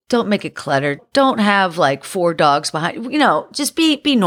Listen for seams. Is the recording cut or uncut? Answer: uncut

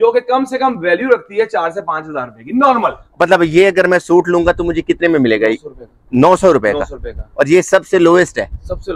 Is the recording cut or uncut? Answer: cut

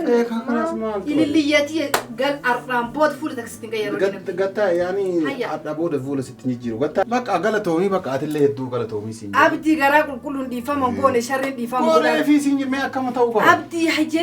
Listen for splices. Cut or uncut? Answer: cut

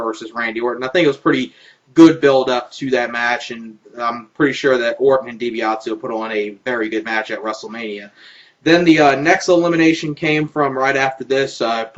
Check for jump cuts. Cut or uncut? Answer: uncut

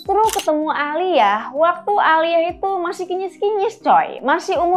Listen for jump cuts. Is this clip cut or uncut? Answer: uncut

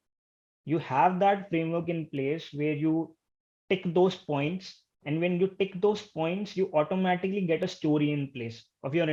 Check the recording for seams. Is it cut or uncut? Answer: uncut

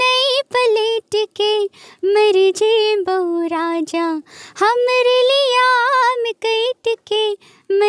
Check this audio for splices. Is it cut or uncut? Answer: uncut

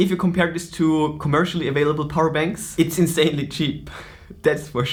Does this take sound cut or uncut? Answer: uncut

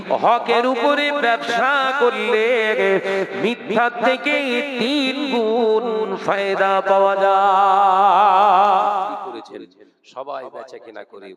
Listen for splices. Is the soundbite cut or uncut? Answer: cut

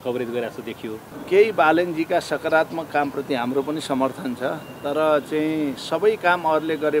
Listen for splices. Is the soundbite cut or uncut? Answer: cut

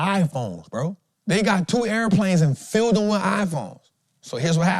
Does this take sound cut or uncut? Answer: cut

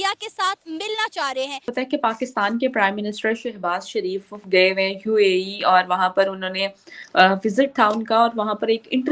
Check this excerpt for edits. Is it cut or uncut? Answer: cut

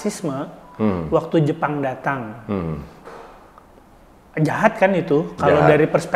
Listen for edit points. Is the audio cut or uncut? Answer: uncut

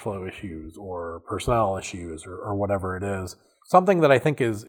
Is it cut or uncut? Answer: uncut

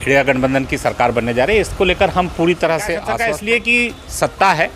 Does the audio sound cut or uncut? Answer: cut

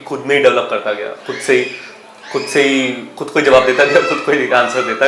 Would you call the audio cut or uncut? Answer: uncut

